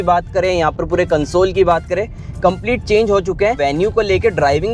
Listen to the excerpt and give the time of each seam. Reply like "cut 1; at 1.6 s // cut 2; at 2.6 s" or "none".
cut 1; at 3.6 s

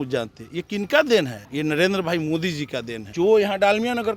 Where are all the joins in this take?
cut 1; at 1.4 s // cut 2; at 3.0 s

